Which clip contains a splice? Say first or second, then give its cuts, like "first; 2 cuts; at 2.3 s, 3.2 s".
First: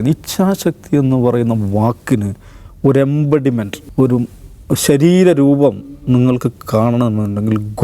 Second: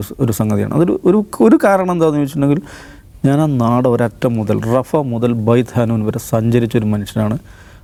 first; 1 cut; at 3.8 s